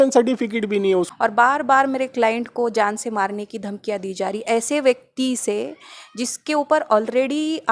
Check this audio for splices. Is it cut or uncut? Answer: cut